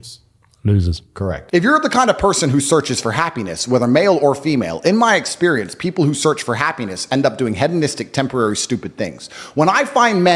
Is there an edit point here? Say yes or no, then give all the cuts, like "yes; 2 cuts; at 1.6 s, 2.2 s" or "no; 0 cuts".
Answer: yes; 1 cut; at 1.4 s